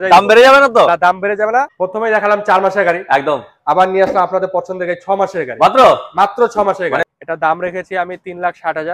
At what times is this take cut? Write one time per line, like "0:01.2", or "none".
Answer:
0:01.8
0:07.1